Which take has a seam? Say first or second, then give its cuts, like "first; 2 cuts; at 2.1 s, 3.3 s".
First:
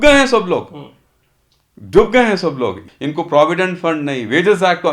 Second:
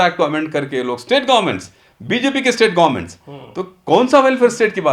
first; 1 cut; at 2.8 s